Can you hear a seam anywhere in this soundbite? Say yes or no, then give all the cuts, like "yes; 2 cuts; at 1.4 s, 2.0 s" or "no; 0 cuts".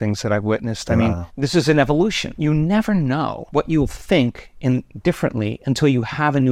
yes; 3 cuts; at 1.3 s, 2.4 s, 3.4 s